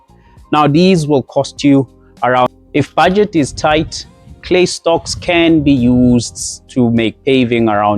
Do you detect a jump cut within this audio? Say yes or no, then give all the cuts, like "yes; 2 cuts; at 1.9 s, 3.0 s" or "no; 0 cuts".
yes; 1 cut; at 2.5 s